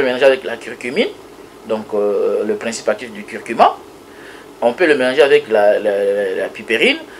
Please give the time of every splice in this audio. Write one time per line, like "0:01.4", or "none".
none